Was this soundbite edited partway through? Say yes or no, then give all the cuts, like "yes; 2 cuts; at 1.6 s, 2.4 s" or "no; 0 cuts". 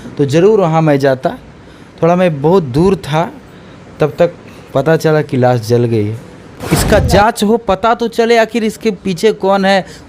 yes; 1 cut; at 6.5 s